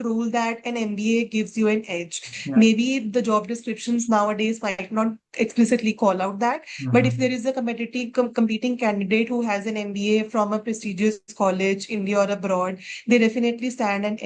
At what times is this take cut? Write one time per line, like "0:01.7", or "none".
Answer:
none